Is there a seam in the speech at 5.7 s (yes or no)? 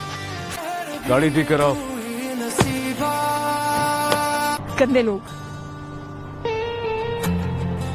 no